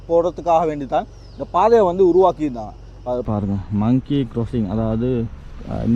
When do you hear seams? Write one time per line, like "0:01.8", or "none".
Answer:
0:03.2